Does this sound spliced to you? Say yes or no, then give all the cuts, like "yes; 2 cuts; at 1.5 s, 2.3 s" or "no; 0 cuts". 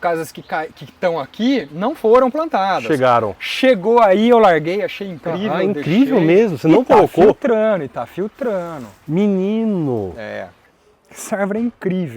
yes; 1 cut; at 11.0 s